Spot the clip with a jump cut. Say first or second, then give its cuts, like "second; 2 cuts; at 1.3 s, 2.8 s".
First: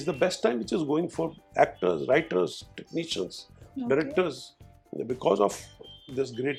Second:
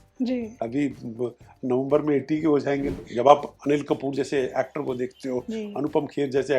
second; 1 cut; at 2.9 s